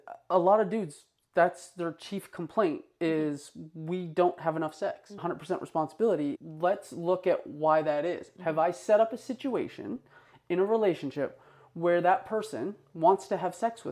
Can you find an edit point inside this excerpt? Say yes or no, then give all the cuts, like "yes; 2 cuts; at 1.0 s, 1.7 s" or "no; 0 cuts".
yes; 2 cuts; at 5.2 s, 6.4 s